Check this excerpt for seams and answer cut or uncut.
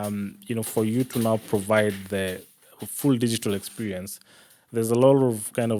uncut